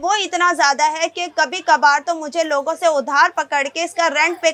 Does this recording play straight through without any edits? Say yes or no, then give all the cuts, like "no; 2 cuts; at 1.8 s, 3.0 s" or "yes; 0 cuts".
yes; 0 cuts